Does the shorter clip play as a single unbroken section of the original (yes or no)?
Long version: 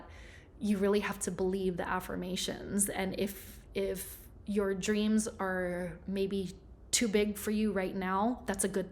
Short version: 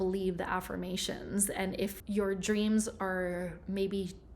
no